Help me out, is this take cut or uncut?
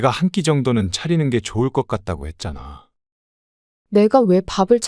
cut